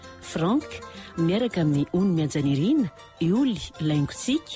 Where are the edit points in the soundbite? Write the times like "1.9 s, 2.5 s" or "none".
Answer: none